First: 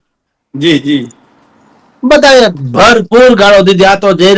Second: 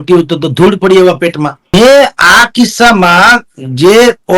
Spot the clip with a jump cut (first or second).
second